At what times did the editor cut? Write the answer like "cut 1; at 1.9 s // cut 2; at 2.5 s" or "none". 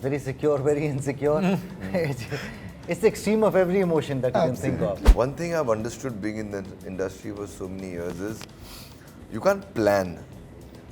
cut 1; at 5.0 s